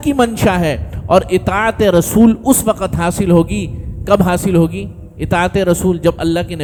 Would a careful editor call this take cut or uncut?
uncut